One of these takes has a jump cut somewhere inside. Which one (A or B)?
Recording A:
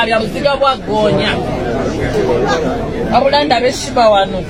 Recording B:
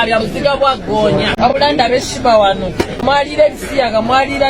B